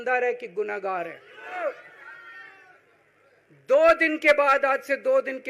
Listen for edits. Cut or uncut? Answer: cut